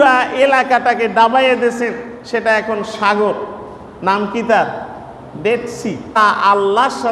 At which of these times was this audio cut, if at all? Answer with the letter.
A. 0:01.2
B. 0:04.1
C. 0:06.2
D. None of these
C